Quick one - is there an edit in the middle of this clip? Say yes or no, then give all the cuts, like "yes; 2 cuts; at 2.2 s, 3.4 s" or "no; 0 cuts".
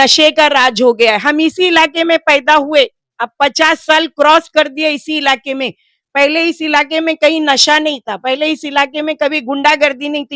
no; 0 cuts